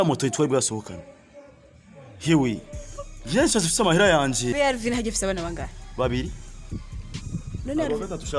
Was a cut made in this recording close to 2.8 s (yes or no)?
no